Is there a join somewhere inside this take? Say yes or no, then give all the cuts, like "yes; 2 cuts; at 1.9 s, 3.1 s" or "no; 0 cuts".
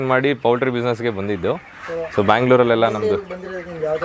no; 0 cuts